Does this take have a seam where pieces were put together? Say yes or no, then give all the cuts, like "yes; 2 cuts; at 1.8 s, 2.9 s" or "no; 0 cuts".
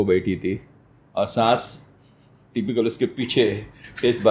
no; 0 cuts